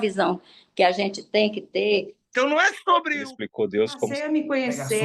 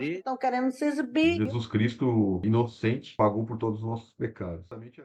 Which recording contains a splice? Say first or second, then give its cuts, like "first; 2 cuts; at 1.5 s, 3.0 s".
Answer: first; 1 cut; at 2.2 s